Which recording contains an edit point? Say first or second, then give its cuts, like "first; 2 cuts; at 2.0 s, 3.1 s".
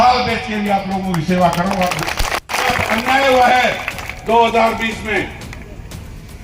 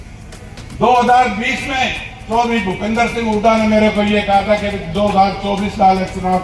first; 1 cut; at 2.7 s